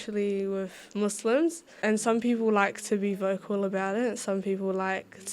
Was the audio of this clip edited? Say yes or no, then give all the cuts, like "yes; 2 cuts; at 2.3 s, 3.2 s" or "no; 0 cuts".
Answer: yes; 1 cut; at 1.7 s